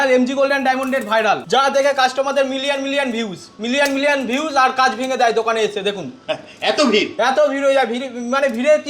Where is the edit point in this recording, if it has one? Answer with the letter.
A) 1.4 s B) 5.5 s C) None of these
A